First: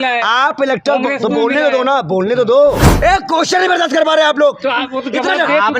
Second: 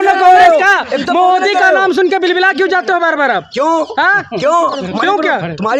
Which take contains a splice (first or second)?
first